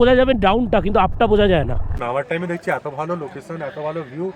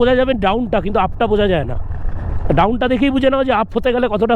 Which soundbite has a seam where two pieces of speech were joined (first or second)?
first